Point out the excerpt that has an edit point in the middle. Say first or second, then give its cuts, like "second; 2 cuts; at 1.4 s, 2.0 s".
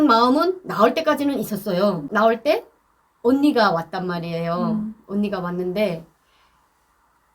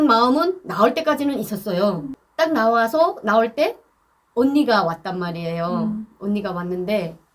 first; 1 cut; at 2.1 s